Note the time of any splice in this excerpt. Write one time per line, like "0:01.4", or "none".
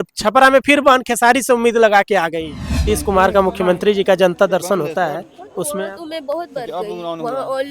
0:02.7